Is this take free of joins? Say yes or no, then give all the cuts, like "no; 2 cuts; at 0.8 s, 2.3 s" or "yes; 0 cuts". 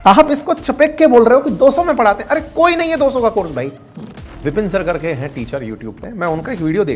no; 2 cuts; at 4.4 s, 6.0 s